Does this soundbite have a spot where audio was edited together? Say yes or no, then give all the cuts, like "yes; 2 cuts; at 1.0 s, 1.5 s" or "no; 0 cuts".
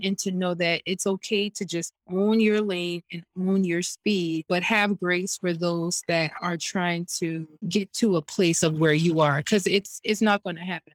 no; 0 cuts